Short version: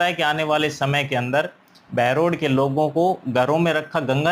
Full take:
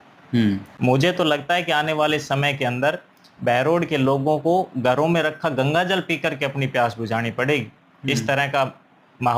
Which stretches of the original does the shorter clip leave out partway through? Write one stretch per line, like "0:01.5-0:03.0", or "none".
none

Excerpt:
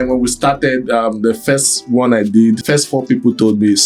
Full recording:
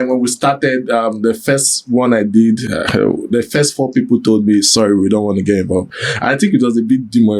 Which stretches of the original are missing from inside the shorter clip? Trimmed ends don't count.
0:02.6-0:03.5

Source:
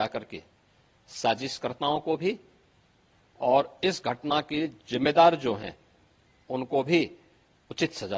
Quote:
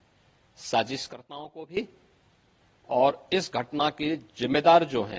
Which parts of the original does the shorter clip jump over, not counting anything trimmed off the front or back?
none

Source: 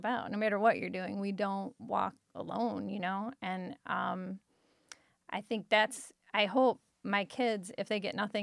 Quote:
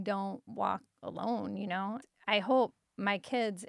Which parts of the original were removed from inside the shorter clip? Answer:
0:03.4-0:06.1

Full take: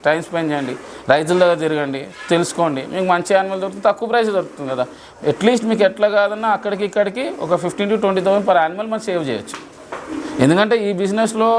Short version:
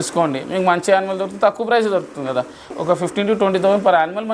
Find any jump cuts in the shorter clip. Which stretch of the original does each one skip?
0:05.1-0:07.3

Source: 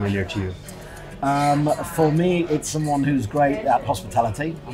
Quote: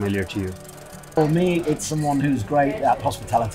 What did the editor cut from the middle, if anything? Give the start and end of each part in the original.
0:01.1-0:01.9

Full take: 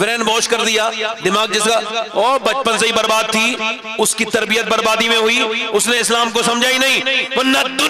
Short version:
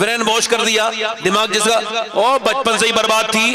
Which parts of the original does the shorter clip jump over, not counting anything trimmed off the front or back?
none

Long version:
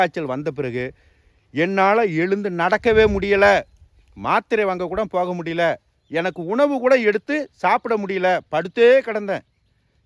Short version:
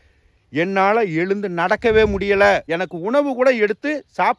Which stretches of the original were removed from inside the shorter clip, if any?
0:03.7-0:06.1

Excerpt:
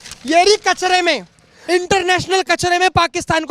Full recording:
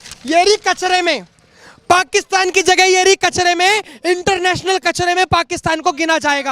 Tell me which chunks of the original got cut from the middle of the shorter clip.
0:01.5-0:03.9

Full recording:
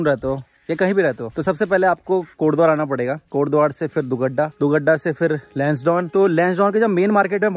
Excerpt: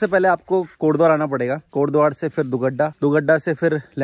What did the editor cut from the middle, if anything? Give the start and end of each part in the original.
none

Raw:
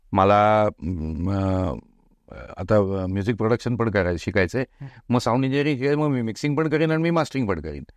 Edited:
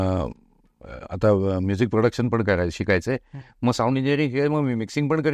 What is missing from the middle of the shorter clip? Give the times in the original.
none

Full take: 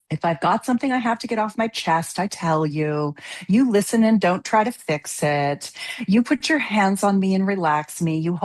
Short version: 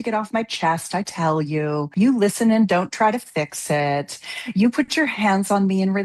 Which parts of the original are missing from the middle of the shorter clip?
0:03.1-0:03.4

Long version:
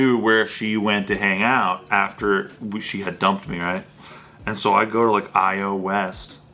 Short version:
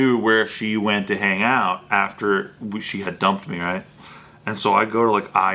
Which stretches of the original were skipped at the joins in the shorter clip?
none

